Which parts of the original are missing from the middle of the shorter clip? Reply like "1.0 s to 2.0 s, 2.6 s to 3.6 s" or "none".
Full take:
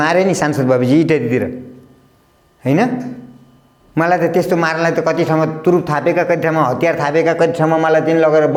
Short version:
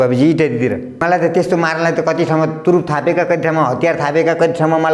1.7 s to 4.0 s